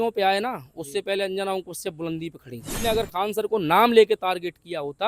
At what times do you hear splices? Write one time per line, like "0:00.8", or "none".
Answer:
0:02.7